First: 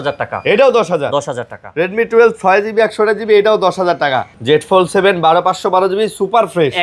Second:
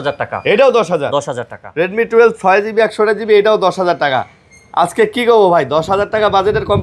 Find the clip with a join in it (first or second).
first